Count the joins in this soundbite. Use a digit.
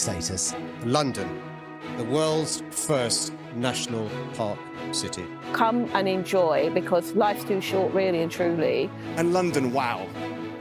0